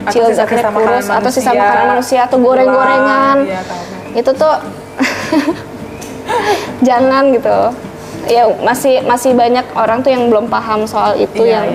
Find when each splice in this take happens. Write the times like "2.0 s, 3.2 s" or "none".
none